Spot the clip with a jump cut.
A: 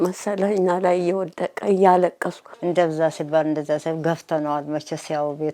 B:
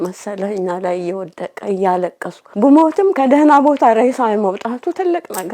A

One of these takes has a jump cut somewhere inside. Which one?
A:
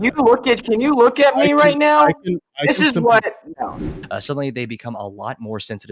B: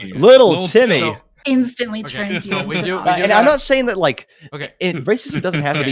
A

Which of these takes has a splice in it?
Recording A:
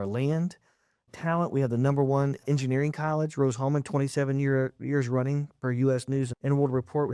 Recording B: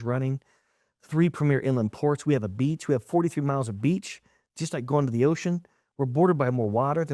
A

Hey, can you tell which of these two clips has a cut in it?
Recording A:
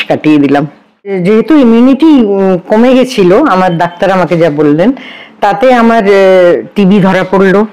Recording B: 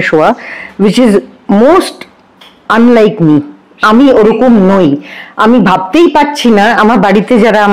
A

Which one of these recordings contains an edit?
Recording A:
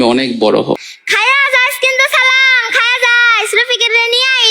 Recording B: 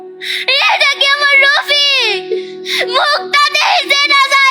A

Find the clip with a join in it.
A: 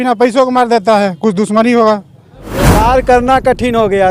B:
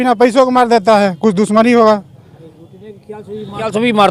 A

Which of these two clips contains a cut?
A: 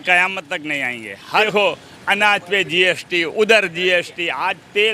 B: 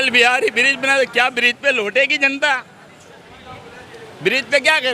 A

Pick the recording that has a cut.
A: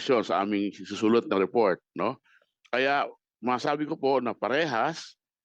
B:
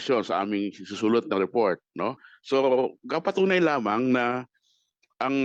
B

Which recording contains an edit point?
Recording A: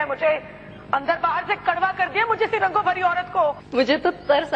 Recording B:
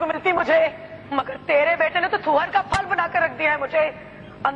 A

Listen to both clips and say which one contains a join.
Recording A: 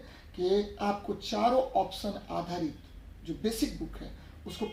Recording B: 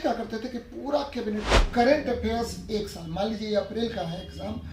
B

